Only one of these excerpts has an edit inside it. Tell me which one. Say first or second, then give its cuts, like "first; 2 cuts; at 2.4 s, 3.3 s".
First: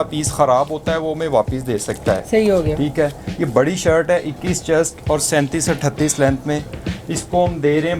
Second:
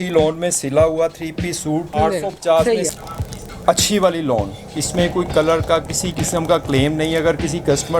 second; 2 cuts; at 1.9 s, 3.0 s